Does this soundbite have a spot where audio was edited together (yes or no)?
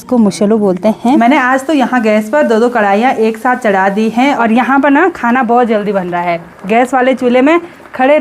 yes